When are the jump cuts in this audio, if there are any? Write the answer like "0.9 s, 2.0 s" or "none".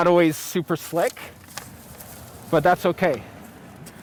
none